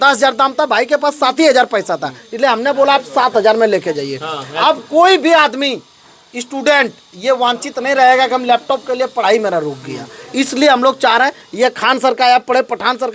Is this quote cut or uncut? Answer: uncut